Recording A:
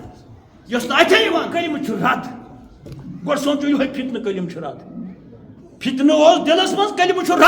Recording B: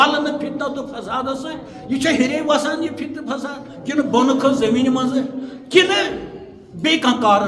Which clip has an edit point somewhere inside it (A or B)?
A